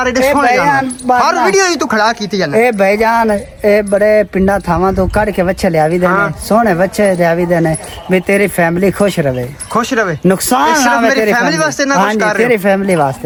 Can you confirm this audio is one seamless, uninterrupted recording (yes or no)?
yes